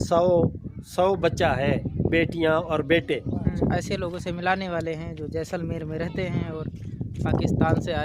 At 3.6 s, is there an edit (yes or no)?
yes